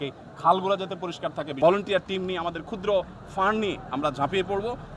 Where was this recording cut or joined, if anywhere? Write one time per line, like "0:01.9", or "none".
0:01.6

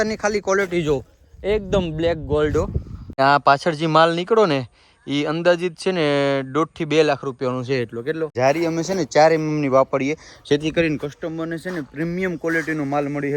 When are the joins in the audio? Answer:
0:03.2
0:08.3

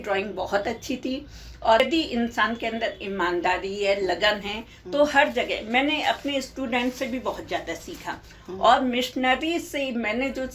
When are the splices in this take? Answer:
0:01.8

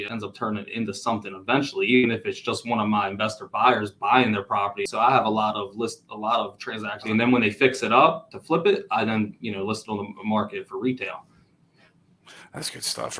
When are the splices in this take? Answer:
0:04.8
0:07.1

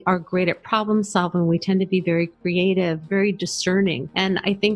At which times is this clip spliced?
0:03.0

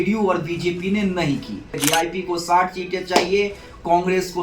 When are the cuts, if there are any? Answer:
0:01.7

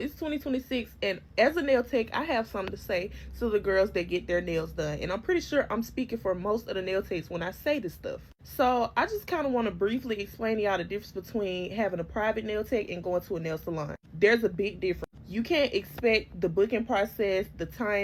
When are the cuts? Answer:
none

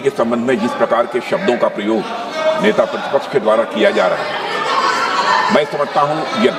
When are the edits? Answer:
none

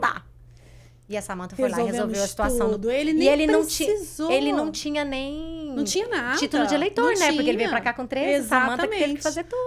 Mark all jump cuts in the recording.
none

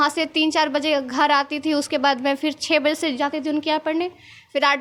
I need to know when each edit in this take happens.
none

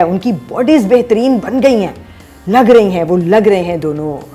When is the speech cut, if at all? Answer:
none

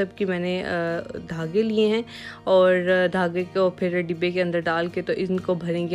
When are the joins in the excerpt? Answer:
none

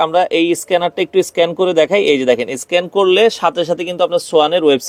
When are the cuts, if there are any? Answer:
none

